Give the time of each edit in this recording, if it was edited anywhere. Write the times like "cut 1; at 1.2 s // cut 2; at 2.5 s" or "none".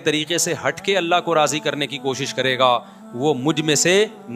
none